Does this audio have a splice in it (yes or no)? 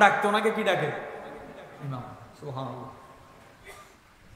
no